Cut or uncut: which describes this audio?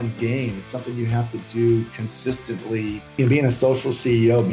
cut